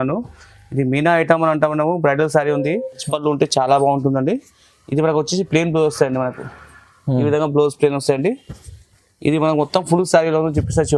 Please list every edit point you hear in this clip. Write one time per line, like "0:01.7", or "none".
0:03.0